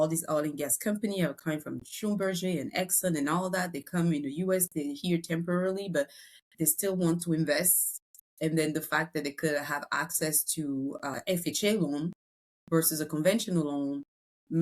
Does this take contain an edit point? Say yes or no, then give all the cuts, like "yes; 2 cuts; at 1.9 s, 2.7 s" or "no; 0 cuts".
yes; 1 cut; at 11.1 s